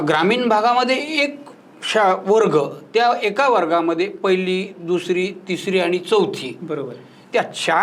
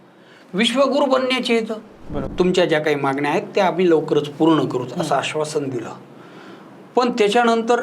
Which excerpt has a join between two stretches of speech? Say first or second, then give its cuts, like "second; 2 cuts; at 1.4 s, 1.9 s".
second; 1 cut; at 2.2 s